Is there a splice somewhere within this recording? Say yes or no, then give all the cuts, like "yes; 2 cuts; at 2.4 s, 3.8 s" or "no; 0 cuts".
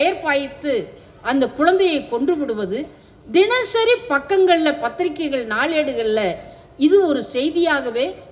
no; 0 cuts